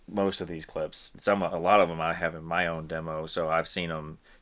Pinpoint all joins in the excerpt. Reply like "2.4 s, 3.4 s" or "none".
1.1 s